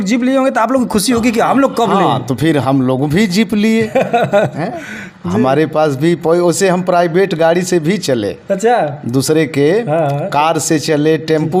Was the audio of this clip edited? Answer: no; 0 cuts

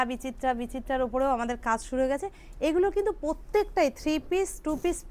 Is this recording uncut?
yes; 0 cuts

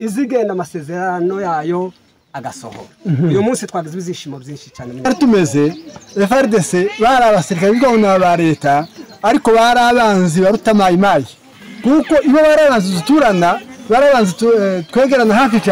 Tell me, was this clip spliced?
yes; 1 cut; at 5.1 s

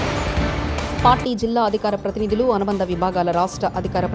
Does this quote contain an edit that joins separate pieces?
no; 0 cuts

